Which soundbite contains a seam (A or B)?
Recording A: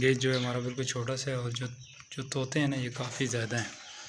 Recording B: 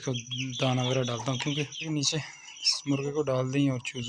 B